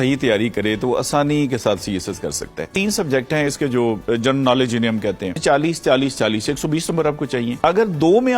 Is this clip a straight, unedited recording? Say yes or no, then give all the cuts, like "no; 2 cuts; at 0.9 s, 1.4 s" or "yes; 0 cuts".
no; 3 cuts; at 2.6 s, 5.4 s, 7.5 s